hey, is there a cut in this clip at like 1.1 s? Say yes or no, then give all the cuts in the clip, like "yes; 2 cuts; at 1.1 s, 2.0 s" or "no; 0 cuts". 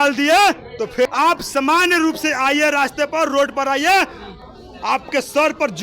yes; 1 cut; at 1.1 s